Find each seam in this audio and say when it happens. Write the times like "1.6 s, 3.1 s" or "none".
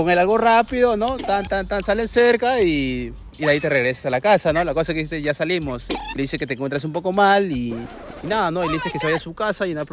none